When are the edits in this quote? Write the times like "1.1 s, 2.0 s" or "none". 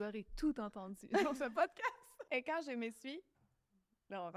2.1 s